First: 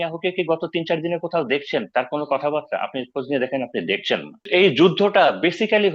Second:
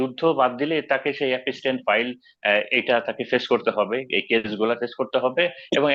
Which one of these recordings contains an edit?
first; 1 cut; at 4.3 s

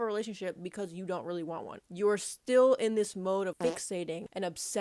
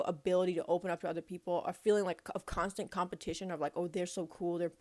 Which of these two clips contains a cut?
first; 2 cuts; at 1.9 s, 3.9 s

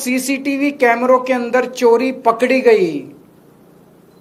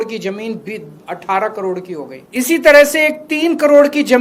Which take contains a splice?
second; 1 cut; at 2.2 s

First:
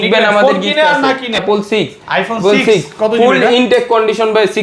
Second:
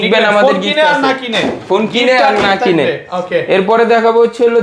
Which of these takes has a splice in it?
first; 1 cut; at 1.4 s

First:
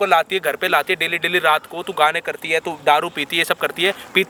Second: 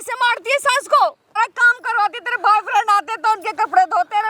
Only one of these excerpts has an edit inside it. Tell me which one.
second; 1 cut; at 1.4 s

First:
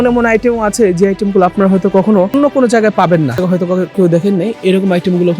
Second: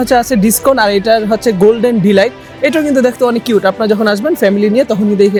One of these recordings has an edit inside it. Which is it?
first; 2 cuts; at 2.3 s, 3.4 s

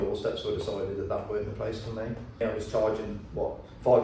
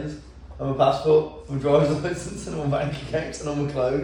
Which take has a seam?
first; 1 cut; at 2.3 s

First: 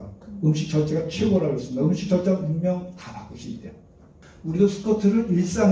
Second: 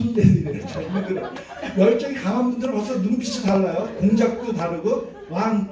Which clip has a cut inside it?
first; 1 cut; at 4.3 s

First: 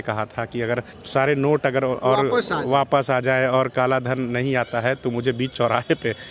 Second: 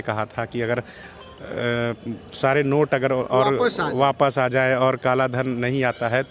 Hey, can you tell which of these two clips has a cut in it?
first; 1 cut; at 1.0 s

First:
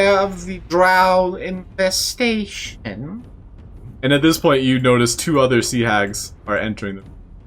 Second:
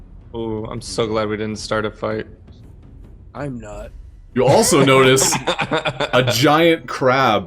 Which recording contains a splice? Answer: first; 1 cut; at 3.9 s

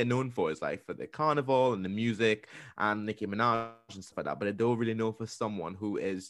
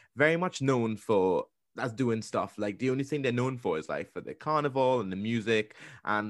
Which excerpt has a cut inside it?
second; 1 cut; at 1.6 s

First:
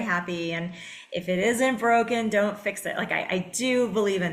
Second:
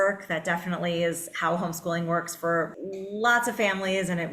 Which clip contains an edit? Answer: second; 1 cut; at 2.8 s

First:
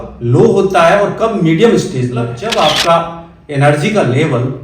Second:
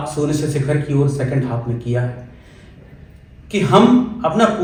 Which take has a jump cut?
first; 1 cut; at 2.4 s

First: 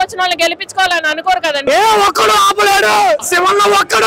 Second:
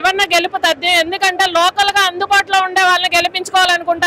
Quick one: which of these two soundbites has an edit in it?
first; 2 cuts; at 1.6 s, 3.3 s

